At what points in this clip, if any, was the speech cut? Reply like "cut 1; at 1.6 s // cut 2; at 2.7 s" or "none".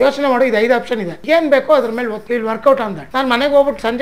cut 1; at 1.1 s // cut 2; at 2.2 s // cut 3; at 3.0 s